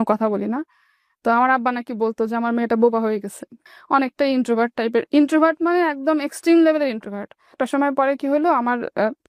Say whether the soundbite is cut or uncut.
uncut